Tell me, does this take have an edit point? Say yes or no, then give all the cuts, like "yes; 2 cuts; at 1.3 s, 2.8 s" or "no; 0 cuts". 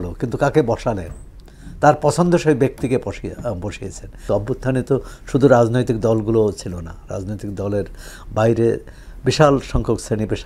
yes; 1 cut; at 4.2 s